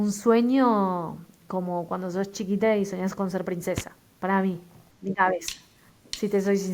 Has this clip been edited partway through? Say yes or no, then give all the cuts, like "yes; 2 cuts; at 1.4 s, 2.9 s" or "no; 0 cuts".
no; 0 cuts